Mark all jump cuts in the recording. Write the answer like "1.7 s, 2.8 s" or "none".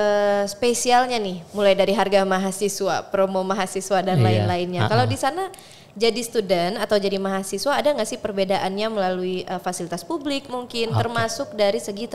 none